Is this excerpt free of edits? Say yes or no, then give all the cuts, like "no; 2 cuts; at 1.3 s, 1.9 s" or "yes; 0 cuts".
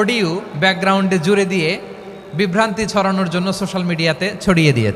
yes; 0 cuts